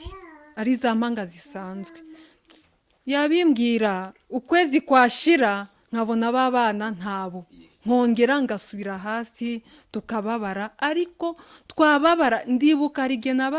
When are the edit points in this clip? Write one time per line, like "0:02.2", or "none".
none